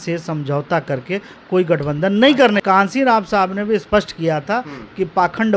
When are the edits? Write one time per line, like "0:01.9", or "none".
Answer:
0:02.6